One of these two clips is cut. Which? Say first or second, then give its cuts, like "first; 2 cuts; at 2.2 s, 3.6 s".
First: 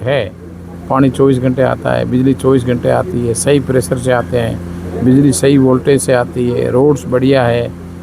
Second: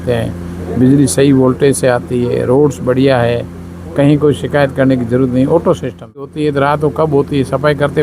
second; 1 cut; at 6.3 s